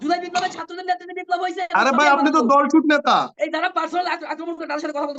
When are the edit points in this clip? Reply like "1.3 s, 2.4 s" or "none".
3.3 s